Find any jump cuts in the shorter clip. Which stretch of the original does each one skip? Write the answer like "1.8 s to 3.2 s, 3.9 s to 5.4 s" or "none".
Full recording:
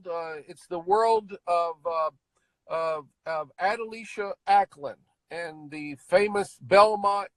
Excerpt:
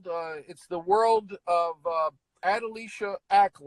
2.3 s to 3.5 s